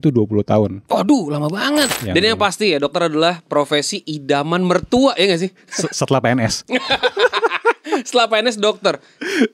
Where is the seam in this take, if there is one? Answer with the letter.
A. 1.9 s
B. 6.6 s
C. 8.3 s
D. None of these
A